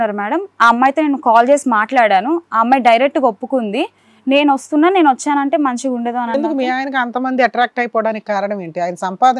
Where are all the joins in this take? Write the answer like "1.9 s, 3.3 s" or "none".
none